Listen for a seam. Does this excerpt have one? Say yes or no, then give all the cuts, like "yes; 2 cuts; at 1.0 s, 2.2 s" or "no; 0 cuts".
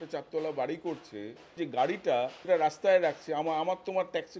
yes; 2 cuts; at 1.5 s, 2.4 s